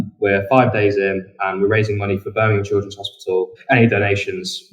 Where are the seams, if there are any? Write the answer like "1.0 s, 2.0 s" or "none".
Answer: 3.6 s